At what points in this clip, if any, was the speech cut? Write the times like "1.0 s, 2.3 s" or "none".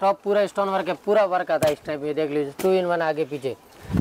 none